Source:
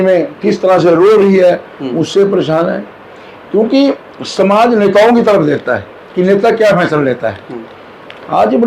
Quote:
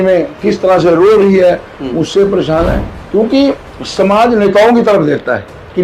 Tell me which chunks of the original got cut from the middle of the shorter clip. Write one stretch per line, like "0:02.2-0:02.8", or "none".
0:02.9-0:03.3